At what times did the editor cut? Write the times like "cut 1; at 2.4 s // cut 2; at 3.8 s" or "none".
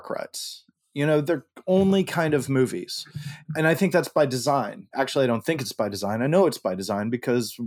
cut 1; at 3.5 s // cut 2; at 4.9 s